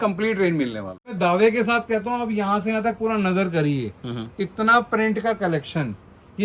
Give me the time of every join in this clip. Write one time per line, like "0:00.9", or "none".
0:01.1